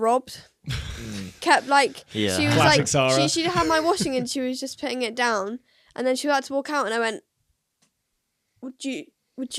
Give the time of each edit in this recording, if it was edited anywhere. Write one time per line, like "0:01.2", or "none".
none